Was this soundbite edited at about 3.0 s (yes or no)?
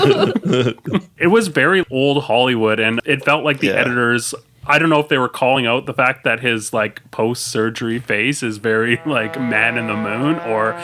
yes